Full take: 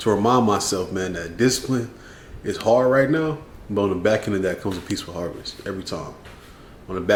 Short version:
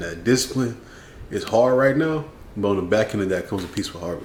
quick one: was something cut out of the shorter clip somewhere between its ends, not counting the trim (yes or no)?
no